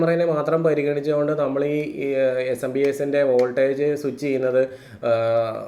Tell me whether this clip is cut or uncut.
uncut